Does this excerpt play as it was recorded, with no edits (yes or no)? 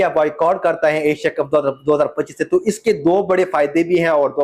no